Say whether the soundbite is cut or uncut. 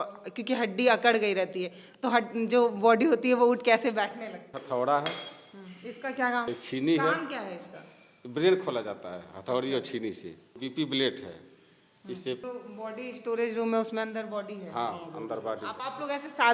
cut